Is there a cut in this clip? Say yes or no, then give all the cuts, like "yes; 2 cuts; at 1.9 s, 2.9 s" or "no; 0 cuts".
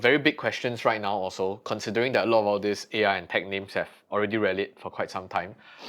no; 0 cuts